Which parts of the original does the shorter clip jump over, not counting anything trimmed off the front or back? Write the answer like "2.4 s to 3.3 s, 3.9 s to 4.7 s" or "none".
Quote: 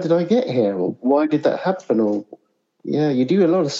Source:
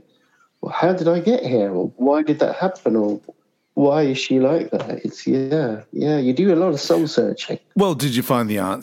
3.7 s to 5.8 s